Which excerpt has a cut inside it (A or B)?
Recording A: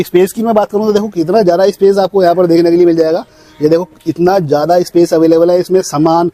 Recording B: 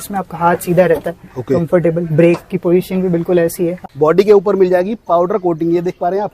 B